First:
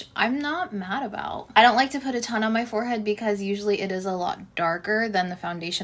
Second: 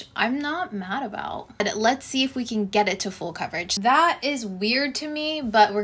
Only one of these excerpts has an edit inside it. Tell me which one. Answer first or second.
second